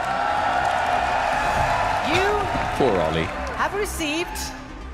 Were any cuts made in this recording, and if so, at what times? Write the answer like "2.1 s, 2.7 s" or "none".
none